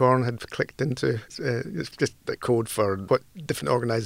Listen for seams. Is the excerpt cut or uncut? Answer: uncut